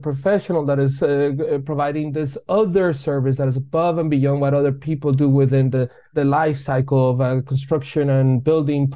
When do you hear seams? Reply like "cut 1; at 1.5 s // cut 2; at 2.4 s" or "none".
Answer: cut 1; at 6.0 s